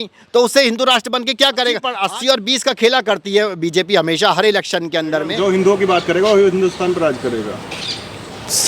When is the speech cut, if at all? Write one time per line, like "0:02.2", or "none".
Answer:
0:02.0
0:05.3